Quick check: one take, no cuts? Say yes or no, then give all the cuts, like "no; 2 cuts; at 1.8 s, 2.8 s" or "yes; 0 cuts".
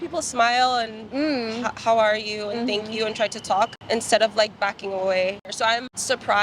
no; 1 cut; at 5.5 s